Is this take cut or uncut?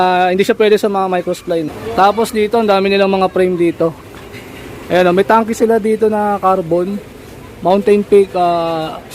cut